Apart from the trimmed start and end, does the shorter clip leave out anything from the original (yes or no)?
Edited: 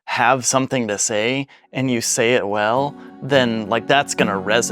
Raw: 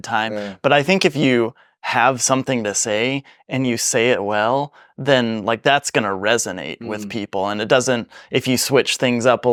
no